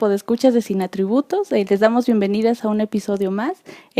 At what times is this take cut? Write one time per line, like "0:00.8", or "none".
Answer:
0:01.8